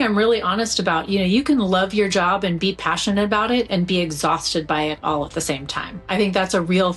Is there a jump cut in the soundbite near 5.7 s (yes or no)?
no